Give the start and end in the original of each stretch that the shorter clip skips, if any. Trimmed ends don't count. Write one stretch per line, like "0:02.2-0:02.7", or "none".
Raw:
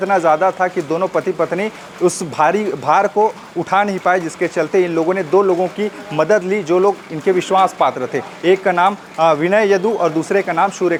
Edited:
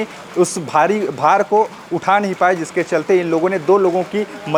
none